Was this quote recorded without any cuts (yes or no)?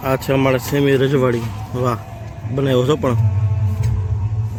yes